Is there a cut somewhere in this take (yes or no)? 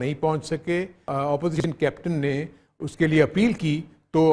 yes